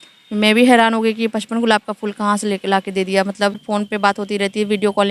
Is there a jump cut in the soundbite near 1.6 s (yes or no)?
no